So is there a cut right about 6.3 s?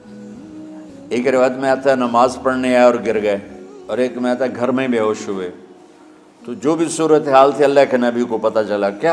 no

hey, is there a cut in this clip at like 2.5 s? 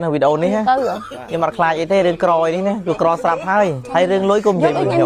no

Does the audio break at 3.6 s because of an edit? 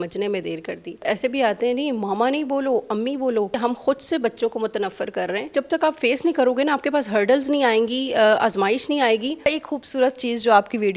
yes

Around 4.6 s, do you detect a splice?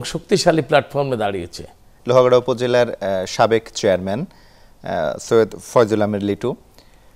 no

